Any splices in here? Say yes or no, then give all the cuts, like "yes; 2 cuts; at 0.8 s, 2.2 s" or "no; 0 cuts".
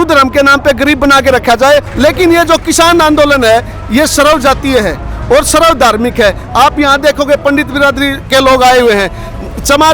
yes; 1 cut; at 1.9 s